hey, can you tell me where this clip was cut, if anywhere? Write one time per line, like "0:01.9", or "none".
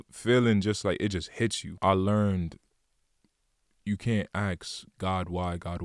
0:01.7